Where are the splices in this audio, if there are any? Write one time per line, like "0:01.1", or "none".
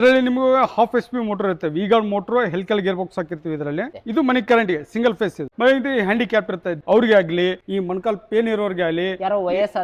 0:05.5